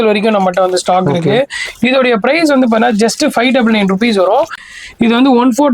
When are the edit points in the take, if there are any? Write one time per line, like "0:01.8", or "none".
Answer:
0:04.6